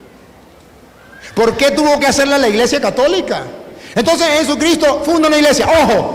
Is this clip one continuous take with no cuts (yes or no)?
yes